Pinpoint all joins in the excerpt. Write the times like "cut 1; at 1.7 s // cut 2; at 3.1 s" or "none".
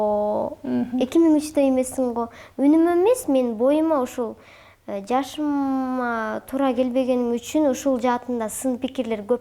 none